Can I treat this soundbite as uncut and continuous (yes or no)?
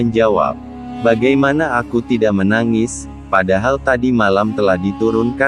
yes